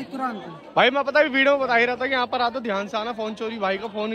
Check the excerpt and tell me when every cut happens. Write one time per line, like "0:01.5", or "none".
none